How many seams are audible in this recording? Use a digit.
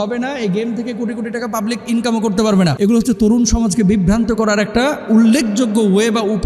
1